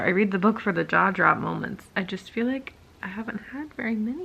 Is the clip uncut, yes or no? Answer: yes